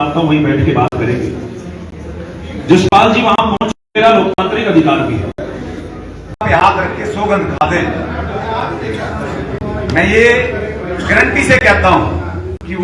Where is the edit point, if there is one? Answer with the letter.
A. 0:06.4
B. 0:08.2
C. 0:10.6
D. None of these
A